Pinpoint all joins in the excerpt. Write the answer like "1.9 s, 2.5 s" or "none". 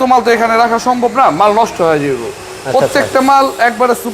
none